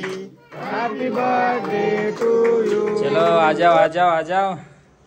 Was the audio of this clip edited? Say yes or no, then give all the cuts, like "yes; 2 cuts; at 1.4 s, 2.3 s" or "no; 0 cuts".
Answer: yes; 1 cut; at 3.1 s